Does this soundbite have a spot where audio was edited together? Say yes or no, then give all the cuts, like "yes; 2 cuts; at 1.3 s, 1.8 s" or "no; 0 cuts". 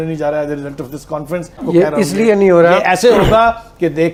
no; 0 cuts